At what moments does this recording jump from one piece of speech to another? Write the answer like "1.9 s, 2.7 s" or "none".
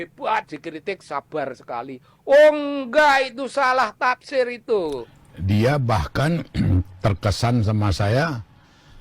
5.0 s